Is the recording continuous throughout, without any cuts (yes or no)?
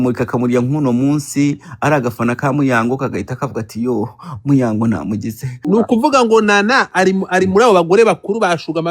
no